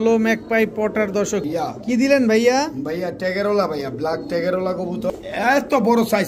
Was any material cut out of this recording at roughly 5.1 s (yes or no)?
yes